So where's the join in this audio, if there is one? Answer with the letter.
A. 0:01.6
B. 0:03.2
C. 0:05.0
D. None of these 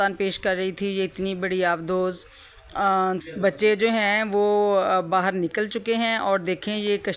B